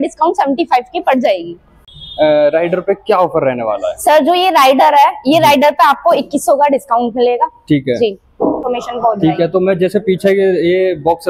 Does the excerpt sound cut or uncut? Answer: cut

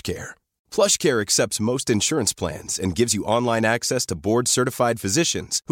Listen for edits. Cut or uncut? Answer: uncut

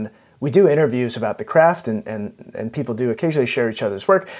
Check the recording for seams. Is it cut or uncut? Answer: cut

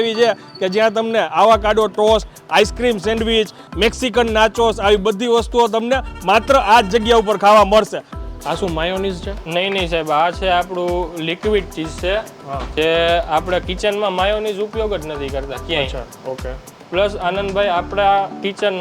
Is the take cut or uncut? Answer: cut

